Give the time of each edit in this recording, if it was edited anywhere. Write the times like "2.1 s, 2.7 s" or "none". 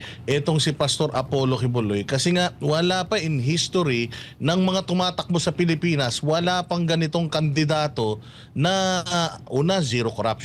none